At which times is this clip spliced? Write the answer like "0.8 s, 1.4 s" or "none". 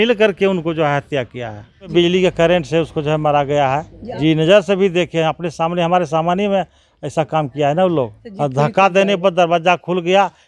1.9 s, 4.0 s, 8.2 s